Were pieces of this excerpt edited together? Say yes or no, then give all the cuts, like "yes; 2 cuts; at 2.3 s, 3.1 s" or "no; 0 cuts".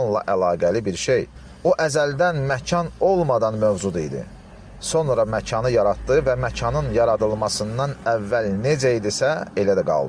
no; 0 cuts